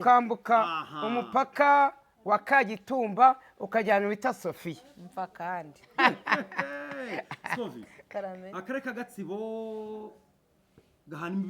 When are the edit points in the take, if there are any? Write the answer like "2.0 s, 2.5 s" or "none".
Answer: 5.8 s